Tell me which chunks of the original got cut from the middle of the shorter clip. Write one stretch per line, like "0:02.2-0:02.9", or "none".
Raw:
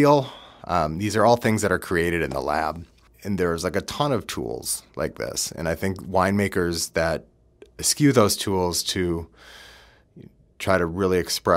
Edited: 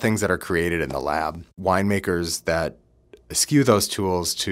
0:02.9-0:06.0